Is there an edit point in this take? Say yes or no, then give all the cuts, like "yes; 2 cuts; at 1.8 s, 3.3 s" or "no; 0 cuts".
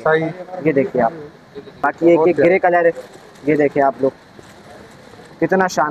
yes; 1 cut; at 1.8 s